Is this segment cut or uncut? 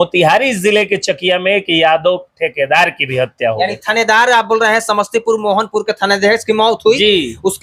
uncut